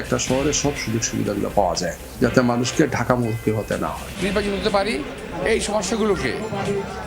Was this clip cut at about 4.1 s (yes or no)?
yes